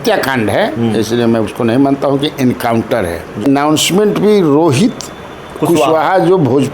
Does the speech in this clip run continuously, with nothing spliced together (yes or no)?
no